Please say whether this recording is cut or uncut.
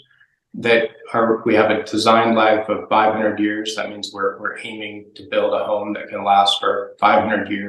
uncut